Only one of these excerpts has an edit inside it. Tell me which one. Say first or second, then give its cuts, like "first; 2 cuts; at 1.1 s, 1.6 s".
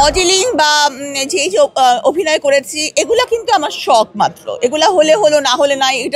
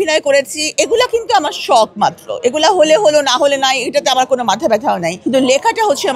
second; 1 cut; at 5.1 s